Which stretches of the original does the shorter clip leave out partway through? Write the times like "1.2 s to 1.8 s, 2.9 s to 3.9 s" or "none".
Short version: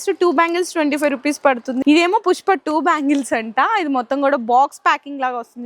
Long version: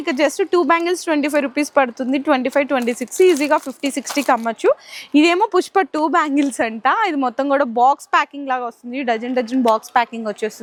2.1 s to 5.1 s

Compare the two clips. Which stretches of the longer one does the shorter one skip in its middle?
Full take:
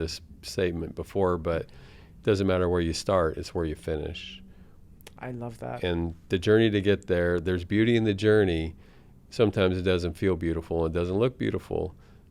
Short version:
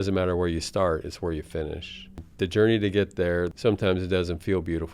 4.6 s to 6.2 s, 7.4 s to 9.3 s

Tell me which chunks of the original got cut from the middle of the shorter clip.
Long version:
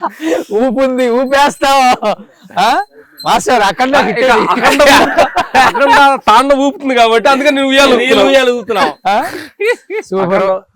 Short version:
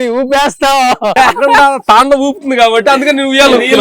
2.1 s to 5.5 s

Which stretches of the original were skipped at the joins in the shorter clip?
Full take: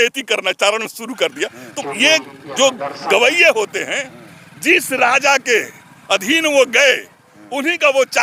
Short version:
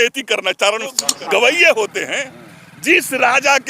1.1 s to 2.8 s

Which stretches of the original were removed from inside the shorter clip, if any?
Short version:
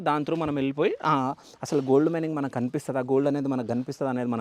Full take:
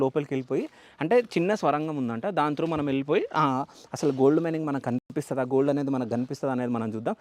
5.0 s to 5.2 s

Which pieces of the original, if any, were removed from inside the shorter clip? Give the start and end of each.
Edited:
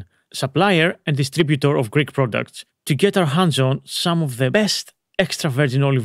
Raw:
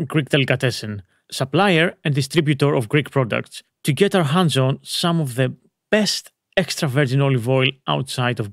5.5 s to 5.9 s

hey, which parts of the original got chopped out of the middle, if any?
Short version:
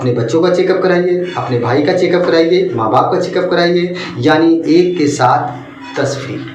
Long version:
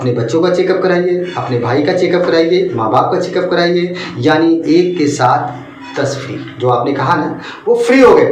none

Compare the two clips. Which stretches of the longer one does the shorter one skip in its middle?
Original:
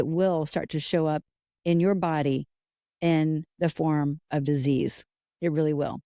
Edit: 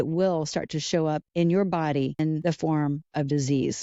1.2 s to 1.5 s, 2.6 s to 3.5 s

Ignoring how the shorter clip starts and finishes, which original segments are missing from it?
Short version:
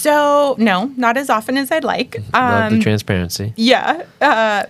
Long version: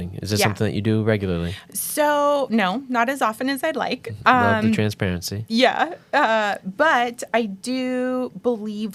none

